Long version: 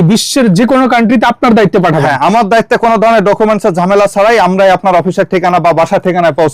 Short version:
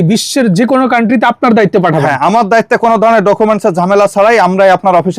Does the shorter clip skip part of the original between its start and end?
no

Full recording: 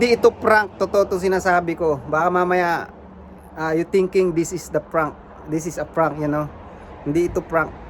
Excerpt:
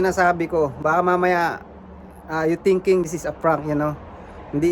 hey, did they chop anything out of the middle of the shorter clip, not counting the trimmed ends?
yes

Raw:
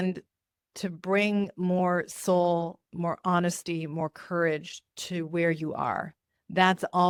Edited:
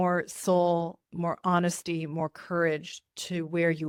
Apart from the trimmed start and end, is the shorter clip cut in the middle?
no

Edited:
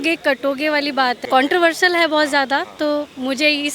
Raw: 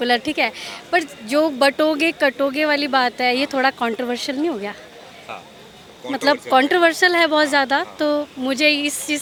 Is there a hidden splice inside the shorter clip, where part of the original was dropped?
yes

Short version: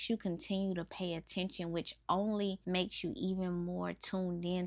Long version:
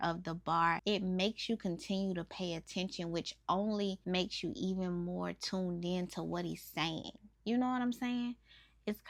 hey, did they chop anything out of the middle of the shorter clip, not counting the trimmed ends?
no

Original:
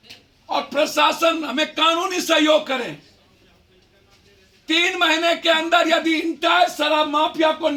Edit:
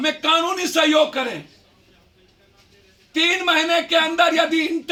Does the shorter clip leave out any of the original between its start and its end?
no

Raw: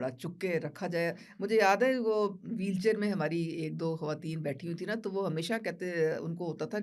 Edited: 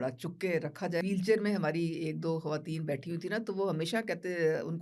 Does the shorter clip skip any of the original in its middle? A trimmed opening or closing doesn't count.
yes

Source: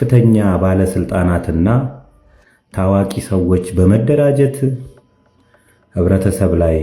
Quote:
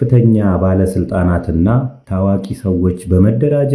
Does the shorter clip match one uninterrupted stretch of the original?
no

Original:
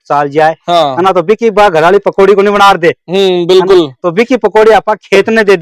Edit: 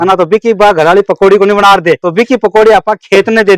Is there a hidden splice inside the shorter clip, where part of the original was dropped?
yes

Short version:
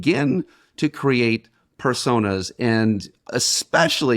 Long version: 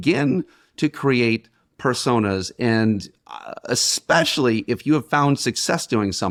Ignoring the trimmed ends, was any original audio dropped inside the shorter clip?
yes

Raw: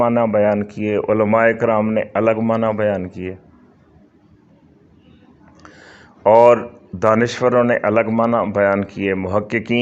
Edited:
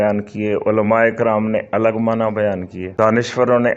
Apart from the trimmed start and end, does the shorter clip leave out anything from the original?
yes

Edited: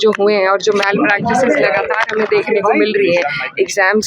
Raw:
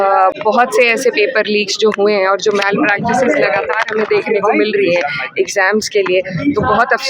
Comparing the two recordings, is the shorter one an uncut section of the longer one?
yes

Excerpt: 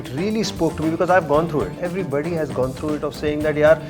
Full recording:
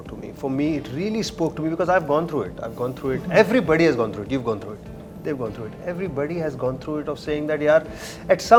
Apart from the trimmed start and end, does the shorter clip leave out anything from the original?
yes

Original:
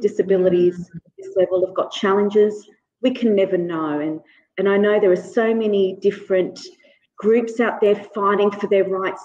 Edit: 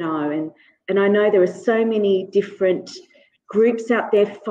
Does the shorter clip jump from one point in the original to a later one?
no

